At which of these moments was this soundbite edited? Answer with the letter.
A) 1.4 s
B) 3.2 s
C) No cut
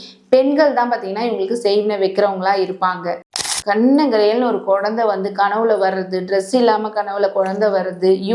B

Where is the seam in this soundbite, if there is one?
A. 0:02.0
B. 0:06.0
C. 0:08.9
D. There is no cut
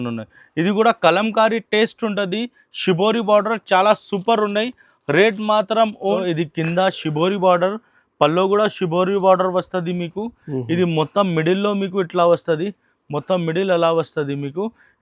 B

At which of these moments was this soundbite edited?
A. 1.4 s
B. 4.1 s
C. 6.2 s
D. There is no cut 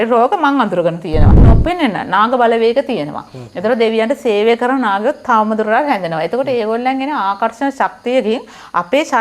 A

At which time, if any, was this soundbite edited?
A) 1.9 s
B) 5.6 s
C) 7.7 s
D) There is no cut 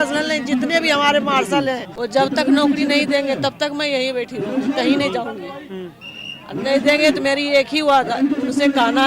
A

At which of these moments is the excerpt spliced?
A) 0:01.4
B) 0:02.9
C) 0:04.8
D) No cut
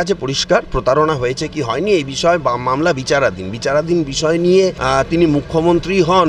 C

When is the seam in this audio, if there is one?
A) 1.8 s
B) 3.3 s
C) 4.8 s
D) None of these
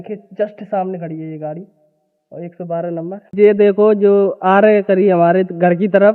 B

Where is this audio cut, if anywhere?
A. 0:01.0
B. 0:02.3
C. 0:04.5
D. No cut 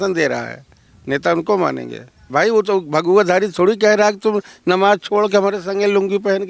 B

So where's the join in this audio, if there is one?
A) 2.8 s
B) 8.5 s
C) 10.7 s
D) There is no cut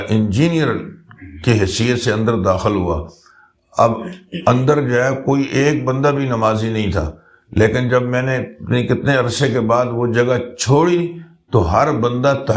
D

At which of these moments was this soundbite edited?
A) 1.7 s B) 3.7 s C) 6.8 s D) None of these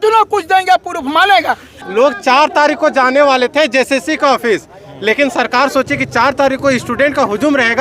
A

